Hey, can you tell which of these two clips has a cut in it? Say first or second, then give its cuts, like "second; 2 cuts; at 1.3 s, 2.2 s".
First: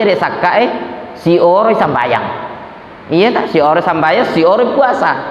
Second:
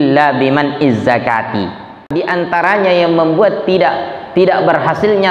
second; 1 cut; at 2.1 s